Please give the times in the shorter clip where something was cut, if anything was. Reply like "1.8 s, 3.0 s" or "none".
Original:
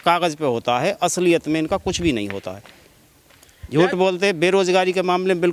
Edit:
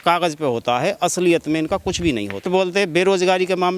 2.5 s